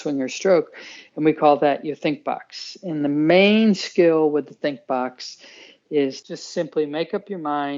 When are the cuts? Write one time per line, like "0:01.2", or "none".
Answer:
0:06.2